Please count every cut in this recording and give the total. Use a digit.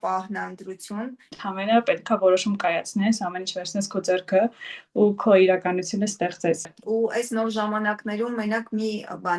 2